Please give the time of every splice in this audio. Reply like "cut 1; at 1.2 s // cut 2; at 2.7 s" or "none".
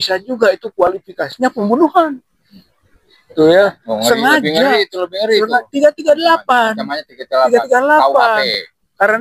none